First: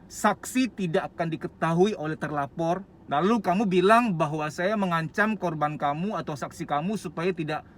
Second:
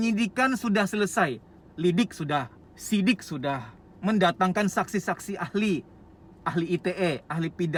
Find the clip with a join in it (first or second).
first